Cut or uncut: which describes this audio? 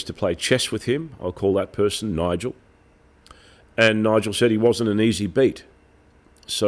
uncut